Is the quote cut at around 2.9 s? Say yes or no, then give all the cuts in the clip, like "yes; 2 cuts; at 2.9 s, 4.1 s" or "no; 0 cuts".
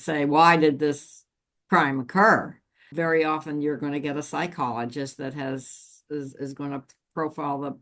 yes; 1 cut; at 2.9 s